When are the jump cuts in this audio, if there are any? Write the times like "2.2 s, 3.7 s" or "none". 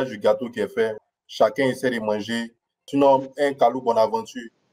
1.0 s, 2.8 s

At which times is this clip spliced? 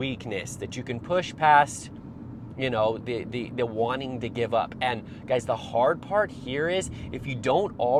none

